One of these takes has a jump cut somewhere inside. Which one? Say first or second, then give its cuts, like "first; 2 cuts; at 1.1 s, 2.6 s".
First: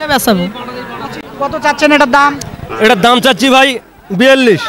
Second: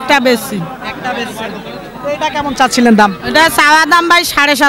first; 1 cut; at 1.3 s